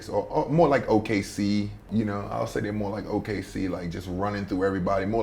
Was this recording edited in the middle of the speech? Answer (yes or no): yes